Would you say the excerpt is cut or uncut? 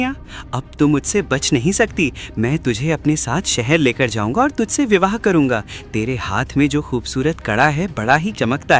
uncut